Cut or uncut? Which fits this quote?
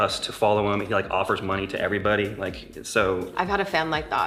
uncut